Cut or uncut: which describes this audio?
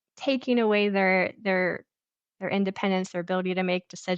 uncut